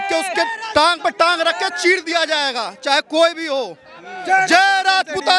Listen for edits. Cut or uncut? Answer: uncut